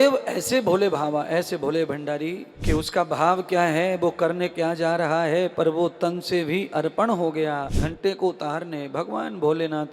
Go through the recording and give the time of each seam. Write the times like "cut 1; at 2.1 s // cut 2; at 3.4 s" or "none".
cut 1; at 2.5 s // cut 2; at 7.8 s